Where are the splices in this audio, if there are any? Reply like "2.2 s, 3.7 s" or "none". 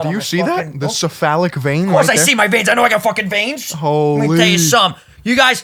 none